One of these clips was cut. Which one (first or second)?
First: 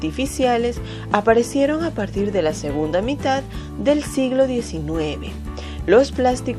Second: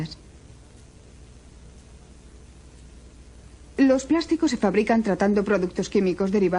first